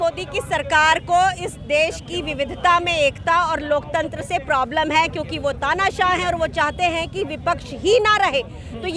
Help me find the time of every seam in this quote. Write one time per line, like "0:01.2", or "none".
none